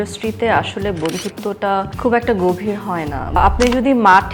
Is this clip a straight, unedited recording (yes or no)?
no